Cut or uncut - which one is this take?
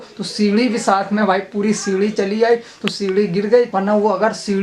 cut